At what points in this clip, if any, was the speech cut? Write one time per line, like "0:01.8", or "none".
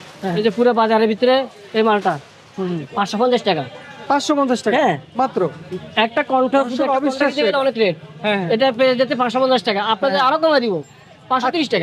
none